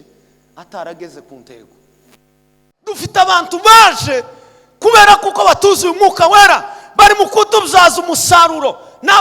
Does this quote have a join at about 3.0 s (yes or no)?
yes